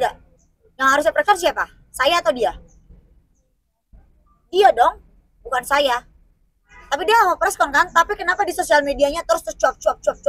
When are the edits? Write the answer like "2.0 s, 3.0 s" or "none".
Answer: none